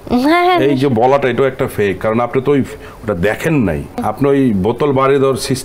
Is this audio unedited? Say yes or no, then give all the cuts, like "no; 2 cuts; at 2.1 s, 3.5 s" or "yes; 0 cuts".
no; 1 cut; at 4.0 s